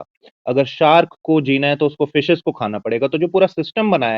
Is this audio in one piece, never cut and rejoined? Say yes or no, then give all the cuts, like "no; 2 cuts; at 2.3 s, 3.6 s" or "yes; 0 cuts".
yes; 0 cuts